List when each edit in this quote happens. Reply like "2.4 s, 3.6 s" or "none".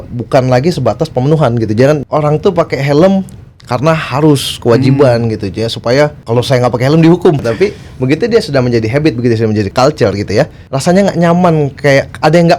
2.0 s, 6.2 s, 7.4 s, 9.7 s, 10.6 s